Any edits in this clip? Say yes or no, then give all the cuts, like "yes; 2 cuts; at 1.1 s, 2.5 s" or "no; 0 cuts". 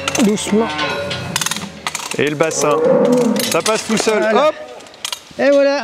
no; 0 cuts